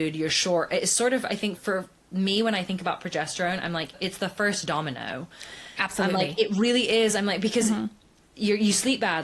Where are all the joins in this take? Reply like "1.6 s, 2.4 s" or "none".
1.6 s, 3.9 s